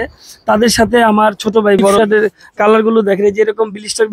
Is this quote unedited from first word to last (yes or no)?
no